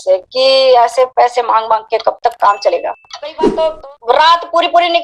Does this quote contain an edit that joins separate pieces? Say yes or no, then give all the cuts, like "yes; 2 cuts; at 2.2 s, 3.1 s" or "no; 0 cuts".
yes; 1 cut; at 3.5 s